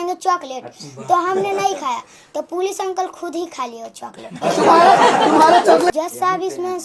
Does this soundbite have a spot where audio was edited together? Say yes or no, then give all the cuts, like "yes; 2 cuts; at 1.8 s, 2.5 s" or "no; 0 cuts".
yes; 1 cut; at 5.9 s